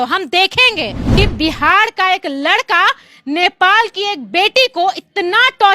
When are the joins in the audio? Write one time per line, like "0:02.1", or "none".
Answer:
0:01.1